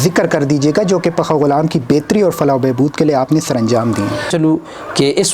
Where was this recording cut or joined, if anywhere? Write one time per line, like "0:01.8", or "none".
0:04.3